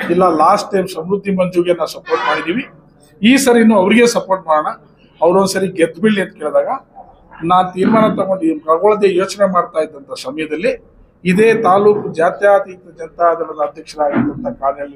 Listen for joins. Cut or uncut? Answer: uncut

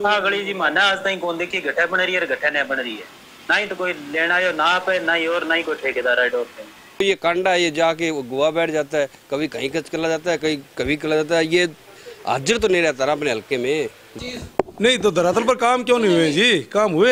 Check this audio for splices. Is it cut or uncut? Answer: cut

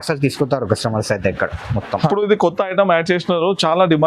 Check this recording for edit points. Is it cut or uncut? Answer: cut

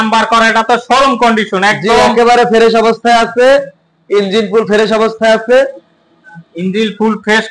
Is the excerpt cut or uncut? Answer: uncut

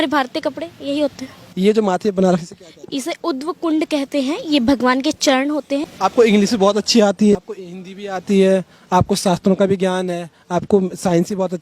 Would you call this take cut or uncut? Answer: cut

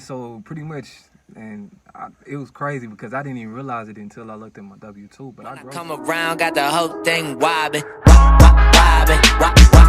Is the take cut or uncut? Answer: cut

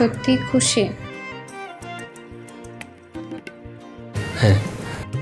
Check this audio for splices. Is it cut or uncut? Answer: uncut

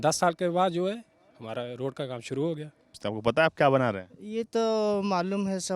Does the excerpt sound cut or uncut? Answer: cut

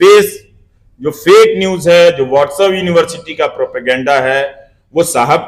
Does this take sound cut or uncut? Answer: uncut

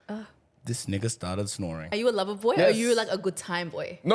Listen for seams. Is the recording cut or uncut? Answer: cut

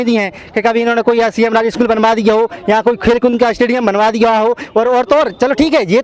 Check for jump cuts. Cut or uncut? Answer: uncut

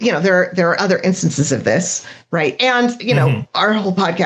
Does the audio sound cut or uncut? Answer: uncut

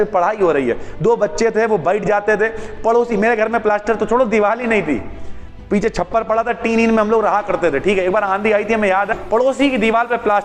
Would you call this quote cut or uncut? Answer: cut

